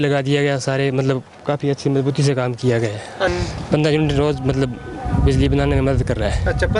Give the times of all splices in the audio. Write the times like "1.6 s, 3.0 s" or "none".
3.3 s